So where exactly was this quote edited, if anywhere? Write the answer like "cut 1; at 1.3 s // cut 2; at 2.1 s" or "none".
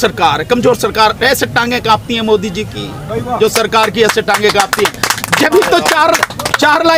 none